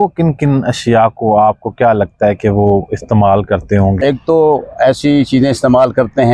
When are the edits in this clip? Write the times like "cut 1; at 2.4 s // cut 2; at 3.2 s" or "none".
cut 1; at 4.0 s